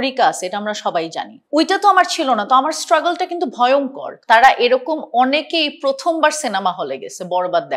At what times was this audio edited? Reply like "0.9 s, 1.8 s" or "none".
1.4 s, 4.0 s